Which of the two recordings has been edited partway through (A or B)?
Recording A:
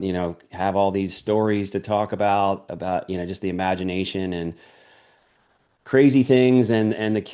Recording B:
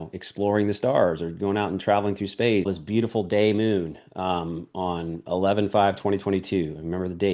B